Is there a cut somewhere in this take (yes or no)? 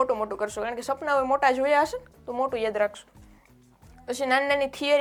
no